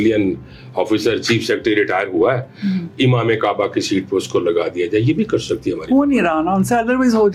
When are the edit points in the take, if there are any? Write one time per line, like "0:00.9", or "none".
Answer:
none

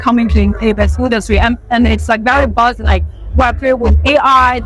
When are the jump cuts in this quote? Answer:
none

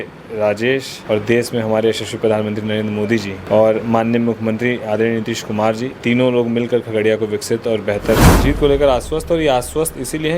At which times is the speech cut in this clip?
0:00.9
0:03.4
0:05.9
0:08.3

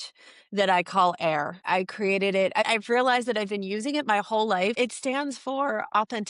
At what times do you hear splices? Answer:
0:01.6
0:02.7
0:04.8

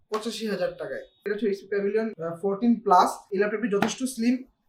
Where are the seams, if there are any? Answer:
0:01.3
0:03.2

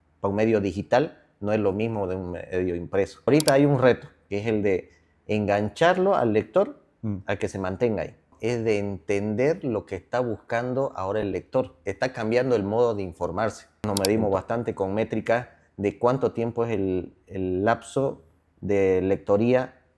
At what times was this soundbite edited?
0:03.3
0:08.3
0:11.8
0:13.9

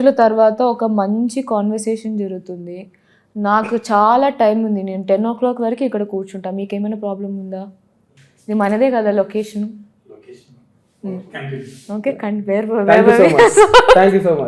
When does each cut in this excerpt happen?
none

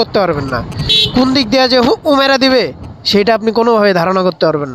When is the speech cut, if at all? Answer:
none

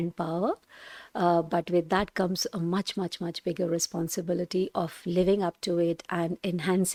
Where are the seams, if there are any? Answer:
none

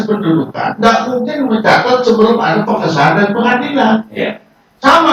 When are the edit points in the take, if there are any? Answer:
none

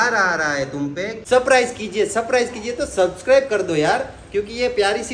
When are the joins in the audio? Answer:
0:01.2

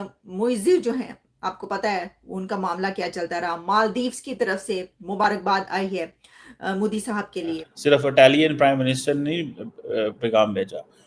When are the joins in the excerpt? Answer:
0:07.7

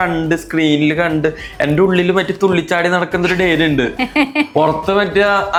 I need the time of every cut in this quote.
none

